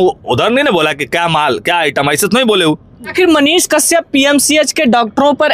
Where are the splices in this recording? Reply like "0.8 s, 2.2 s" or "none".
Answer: 3.0 s